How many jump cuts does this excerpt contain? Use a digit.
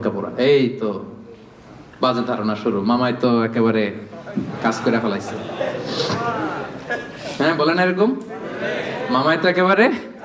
0